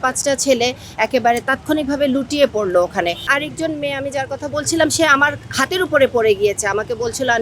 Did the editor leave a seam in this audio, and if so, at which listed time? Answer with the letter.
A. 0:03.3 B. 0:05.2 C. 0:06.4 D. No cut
A